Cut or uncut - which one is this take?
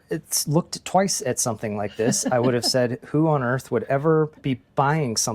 cut